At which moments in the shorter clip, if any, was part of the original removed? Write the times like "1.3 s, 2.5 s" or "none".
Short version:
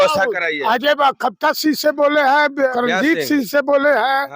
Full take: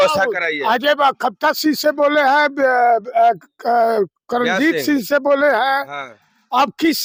2.7 s